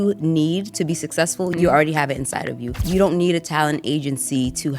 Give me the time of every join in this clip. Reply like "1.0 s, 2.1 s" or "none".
1.5 s, 2.8 s

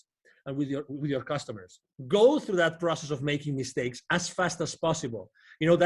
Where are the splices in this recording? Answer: 1.9 s

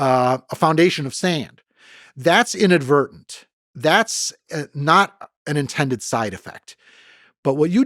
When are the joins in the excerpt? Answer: none

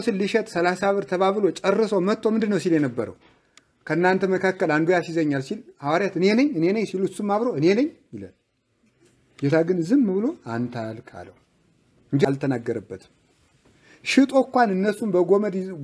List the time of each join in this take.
12.2 s

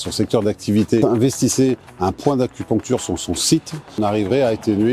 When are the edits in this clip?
4.0 s

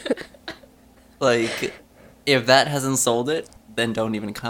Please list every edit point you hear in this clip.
3.6 s

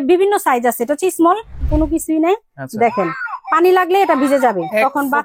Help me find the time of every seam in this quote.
1.5 s

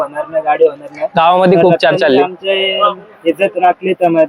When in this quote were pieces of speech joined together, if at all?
none

